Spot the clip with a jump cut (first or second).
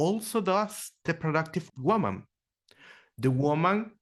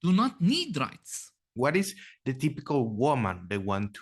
second